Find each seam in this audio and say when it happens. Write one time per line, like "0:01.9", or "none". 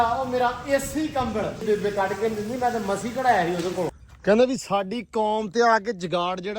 0:01.6
0:04.0